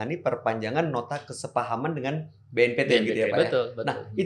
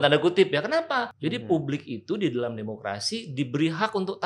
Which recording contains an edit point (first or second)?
second